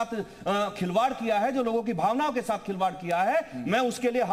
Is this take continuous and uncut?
yes; 0 cuts

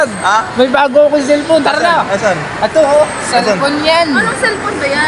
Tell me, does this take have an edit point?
no; 0 cuts

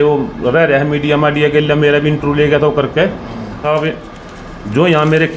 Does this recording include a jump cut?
yes; 1 cut; at 3.6 s

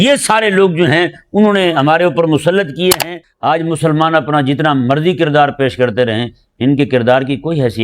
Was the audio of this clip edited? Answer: yes; 1 cut; at 3.1 s

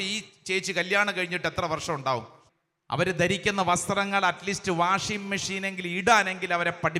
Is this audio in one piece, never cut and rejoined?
no; 1 cut; at 2.4 s

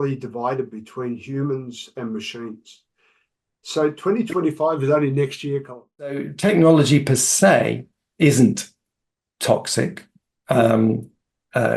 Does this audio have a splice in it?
yes; 1 cut; at 6.2 s

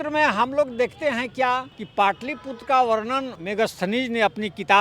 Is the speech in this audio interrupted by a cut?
yes; 2 cuts; at 1.8 s, 3.4 s

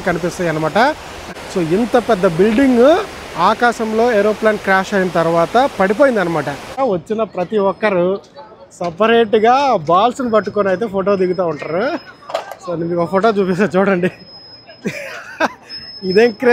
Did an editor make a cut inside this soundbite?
yes; 2 cuts; at 1.2 s, 6.7 s

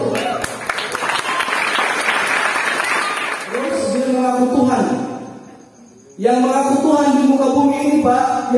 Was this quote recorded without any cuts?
no; 1 cut; at 3.5 s

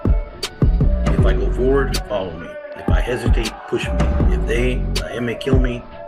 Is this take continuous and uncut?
yes; 0 cuts

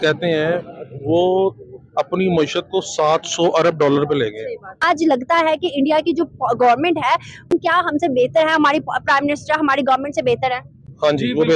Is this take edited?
yes; 2 cuts; at 4.8 s, 7.5 s

